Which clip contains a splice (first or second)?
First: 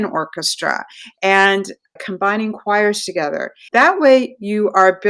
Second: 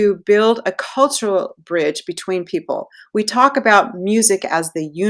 first